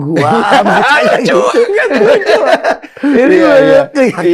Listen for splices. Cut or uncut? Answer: uncut